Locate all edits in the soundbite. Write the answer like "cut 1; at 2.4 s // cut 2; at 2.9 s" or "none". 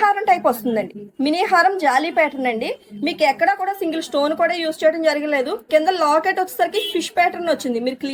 none